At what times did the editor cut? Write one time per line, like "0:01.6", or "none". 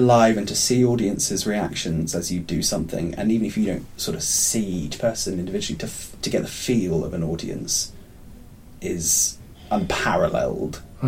0:09.6